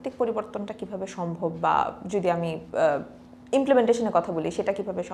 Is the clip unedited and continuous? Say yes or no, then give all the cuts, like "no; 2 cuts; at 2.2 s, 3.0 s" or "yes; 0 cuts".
yes; 0 cuts